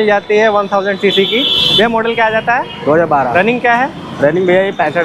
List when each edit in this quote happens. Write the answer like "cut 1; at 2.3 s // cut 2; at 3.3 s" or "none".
cut 1; at 3.3 s